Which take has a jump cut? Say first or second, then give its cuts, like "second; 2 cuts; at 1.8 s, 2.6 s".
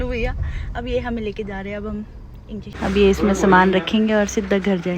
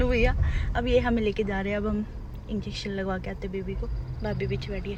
first; 1 cut; at 2.7 s